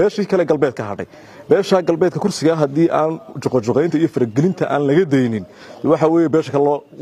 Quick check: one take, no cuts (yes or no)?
yes